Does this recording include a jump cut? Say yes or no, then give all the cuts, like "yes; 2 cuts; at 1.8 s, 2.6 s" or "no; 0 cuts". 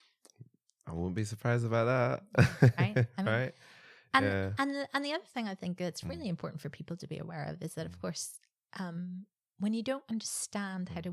no; 0 cuts